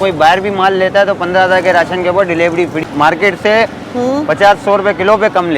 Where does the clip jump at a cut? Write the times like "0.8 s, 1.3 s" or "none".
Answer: 2.8 s